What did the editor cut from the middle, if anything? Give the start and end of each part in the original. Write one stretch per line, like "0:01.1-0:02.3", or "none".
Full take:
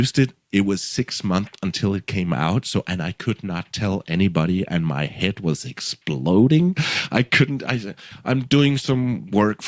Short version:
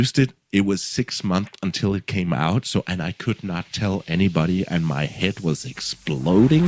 none